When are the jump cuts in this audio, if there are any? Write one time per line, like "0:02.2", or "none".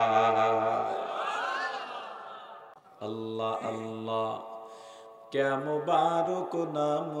0:02.9

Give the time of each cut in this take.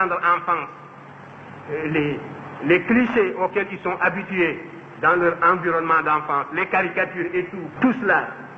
0:07.6

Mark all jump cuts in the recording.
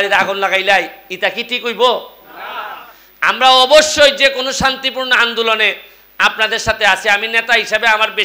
none

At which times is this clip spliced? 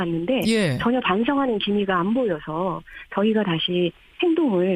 0:02.0

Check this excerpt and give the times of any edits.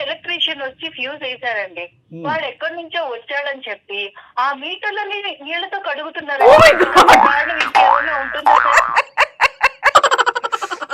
none

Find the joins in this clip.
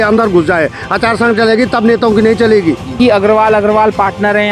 0:03.0

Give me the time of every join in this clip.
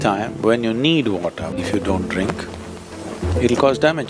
0:01.6

